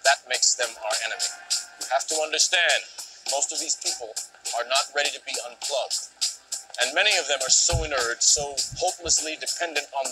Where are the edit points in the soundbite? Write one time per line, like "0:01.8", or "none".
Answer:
0:07.4